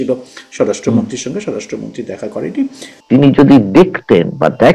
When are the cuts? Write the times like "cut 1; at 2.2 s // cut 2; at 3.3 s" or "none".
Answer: cut 1; at 2.9 s